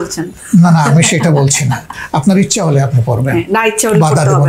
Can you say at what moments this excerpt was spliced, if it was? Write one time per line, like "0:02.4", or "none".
none